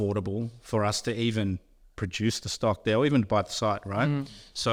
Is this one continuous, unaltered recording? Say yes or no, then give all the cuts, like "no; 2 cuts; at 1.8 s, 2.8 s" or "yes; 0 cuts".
yes; 0 cuts